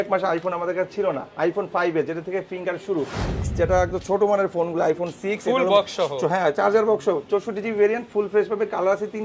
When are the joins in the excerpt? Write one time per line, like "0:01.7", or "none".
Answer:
0:03.3

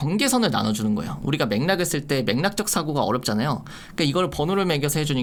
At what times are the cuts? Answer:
none

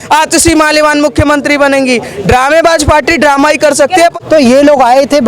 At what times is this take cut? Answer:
0:04.1

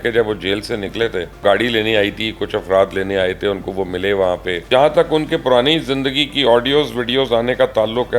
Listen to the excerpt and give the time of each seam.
0:01.3
0:04.6

